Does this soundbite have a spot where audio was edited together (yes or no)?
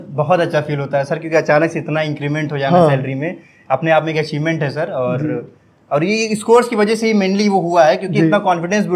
no